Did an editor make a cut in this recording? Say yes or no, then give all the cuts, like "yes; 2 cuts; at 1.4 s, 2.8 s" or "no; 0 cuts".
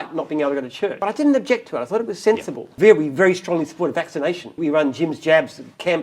yes; 3 cuts; at 1.0 s, 2.7 s, 4.6 s